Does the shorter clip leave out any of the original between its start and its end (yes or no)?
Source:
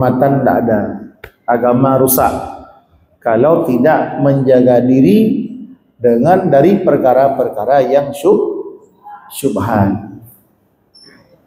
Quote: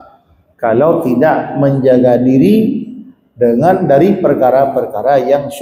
no